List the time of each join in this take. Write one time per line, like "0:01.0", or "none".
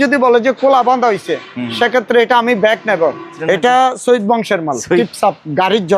0:03.3
0:05.0